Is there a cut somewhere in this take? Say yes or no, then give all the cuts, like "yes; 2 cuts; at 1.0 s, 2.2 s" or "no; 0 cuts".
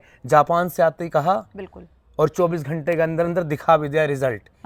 no; 0 cuts